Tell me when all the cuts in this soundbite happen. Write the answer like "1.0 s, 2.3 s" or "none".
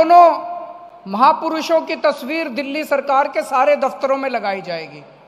none